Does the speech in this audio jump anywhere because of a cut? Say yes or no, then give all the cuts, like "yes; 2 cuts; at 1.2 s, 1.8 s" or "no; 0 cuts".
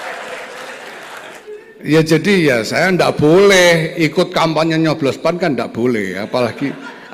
yes; 1 cut; at 1.4 s